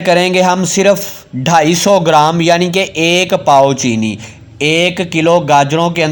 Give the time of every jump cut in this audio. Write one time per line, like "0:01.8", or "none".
none